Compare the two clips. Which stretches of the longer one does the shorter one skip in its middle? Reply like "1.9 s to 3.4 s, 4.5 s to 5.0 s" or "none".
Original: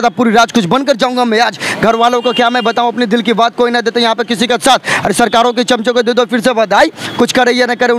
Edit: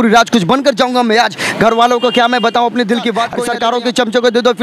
3.6 s to 5.1 s